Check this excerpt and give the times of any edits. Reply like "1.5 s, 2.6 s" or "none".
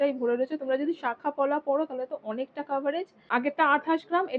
3.2 s